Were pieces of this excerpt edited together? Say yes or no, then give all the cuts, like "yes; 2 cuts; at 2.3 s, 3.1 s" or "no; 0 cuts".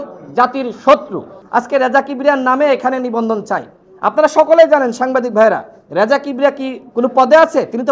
yes; 1 cut; at 1.4 s